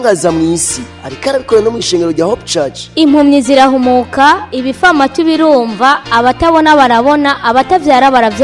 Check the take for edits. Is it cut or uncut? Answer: cut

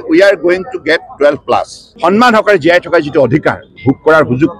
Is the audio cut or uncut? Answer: cut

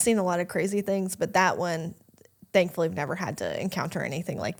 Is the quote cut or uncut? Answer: uncut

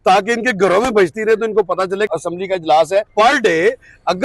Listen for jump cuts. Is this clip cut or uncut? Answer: cut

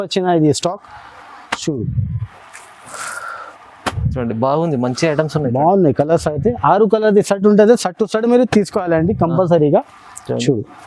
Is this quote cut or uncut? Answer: uncut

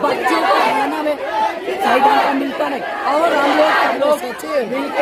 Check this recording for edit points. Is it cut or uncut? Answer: uncut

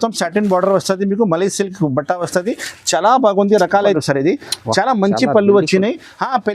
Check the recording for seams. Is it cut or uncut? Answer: cut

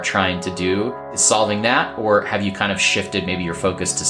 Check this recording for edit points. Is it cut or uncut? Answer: cut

